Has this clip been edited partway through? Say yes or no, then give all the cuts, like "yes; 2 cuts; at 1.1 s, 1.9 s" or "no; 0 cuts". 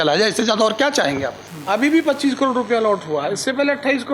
yes; 1 cut; at 1.4 s